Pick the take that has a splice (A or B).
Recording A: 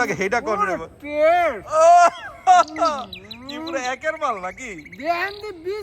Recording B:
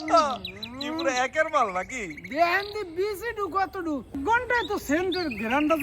B